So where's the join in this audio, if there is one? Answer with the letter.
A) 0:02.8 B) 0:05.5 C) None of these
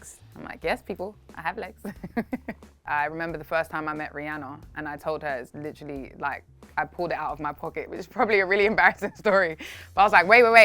A